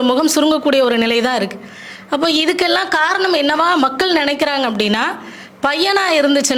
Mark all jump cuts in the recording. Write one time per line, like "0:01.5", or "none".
none